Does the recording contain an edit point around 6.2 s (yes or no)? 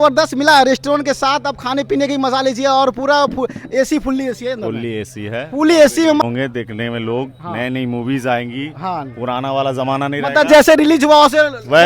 yes